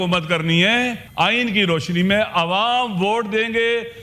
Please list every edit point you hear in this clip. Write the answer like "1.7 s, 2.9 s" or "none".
1.0 s